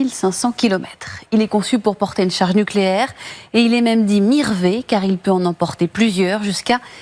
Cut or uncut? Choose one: uncut